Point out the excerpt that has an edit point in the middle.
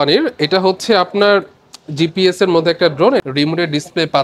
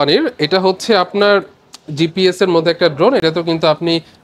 first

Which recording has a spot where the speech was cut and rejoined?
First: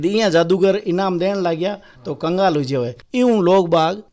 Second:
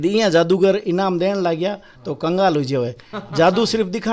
first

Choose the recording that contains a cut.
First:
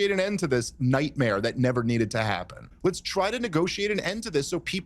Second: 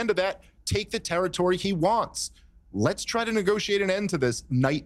first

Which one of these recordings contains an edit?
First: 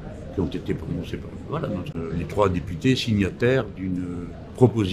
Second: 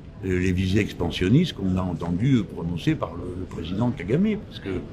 first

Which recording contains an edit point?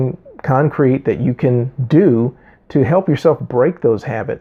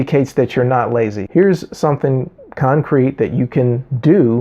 second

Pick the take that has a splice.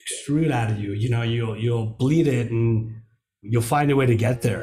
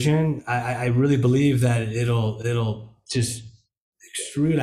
first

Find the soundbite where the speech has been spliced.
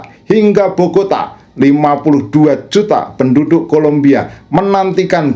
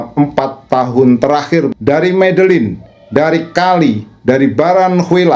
second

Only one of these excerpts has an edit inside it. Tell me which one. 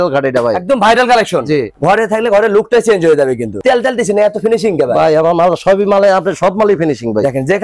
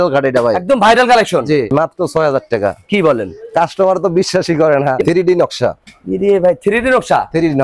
second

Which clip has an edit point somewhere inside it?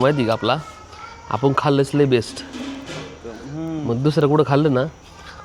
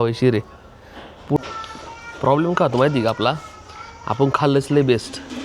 second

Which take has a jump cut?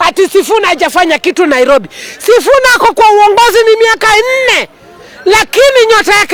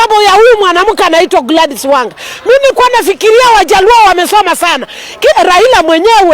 second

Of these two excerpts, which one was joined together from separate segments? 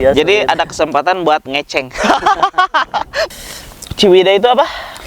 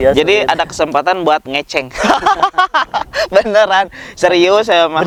first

